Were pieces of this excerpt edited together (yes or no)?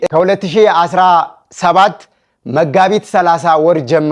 no